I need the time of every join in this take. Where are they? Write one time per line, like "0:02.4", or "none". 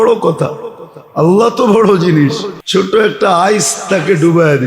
0:02.5